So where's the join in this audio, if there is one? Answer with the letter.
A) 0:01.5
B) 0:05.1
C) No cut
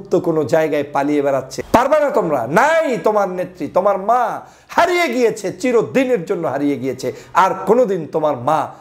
A